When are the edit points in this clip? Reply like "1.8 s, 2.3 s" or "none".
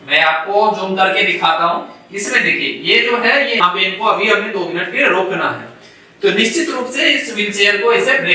3.6 s